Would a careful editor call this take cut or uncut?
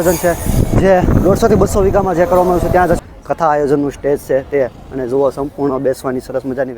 cut